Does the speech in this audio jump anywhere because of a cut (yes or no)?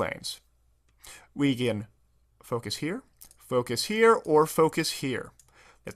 no